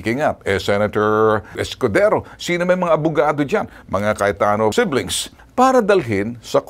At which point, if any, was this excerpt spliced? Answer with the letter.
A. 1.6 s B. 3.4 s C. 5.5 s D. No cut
A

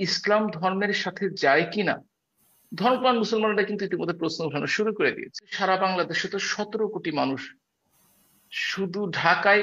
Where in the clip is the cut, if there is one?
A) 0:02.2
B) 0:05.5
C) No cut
B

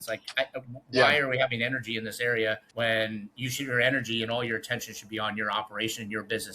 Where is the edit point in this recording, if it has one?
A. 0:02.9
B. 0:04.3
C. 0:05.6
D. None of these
A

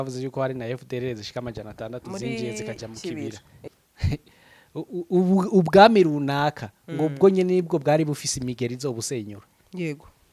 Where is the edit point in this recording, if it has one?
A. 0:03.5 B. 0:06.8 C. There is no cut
A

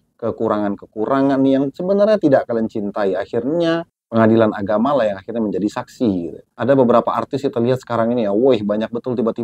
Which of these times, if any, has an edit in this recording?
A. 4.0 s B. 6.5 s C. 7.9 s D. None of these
B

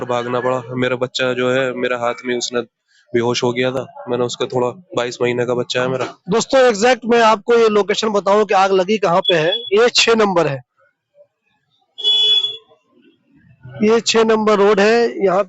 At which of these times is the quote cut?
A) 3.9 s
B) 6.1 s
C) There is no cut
C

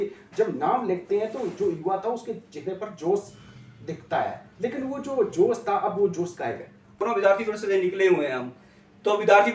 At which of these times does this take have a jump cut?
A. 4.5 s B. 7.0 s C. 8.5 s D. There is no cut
B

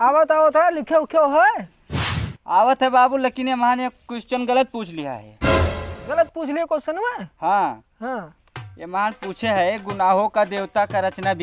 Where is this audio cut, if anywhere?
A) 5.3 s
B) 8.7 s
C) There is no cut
C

